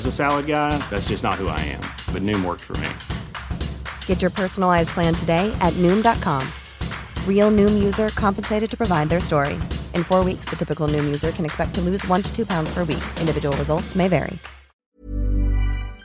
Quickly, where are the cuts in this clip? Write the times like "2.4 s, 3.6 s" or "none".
14.8 s